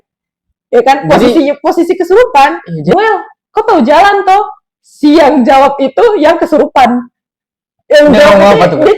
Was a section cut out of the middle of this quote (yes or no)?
yes